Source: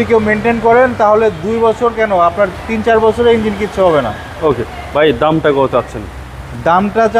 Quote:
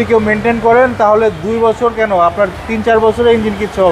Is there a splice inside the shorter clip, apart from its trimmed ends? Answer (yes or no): no